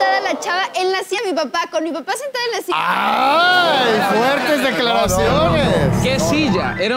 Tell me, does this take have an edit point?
yes; 1 cut; at 1.2 s

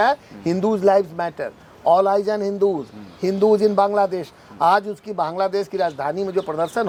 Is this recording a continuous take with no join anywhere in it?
yes; 0 cuts

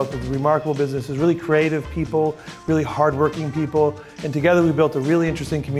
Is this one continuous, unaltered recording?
yes; 0 cuts

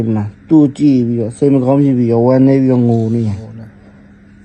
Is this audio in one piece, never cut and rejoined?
yes; 0 cuts

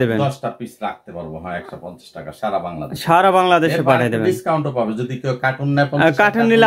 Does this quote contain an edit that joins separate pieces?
no; 0 cuts

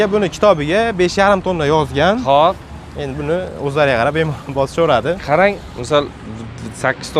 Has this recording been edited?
no; 0 cuts

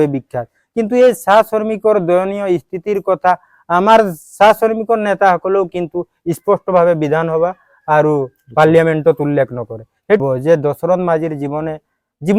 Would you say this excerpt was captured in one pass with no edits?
no; 1 cut; at 10.2 s

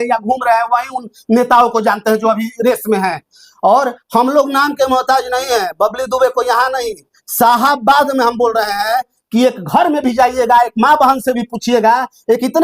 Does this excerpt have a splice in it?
no; 0 cuts

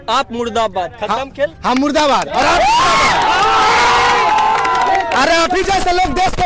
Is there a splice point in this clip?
no; 0 cuts

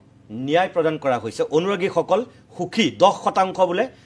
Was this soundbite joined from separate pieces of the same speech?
no; 0 cuts

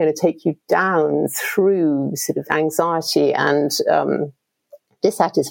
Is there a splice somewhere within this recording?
no; 0 cuts

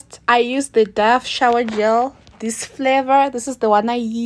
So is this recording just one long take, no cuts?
yes; 0 cuts

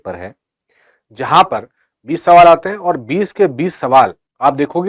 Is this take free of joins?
yes; 0 cuts

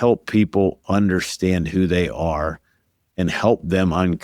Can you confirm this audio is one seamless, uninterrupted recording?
yes; 0 cuts

